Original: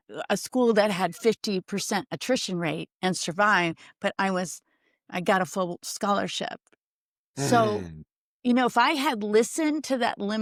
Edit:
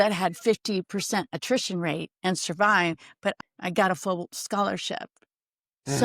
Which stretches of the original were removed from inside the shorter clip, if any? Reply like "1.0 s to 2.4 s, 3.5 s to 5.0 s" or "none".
4.1 s to 4.9 s

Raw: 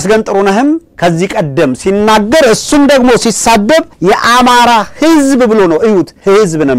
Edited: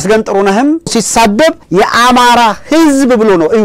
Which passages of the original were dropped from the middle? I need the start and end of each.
0.9 s to 3.2 s

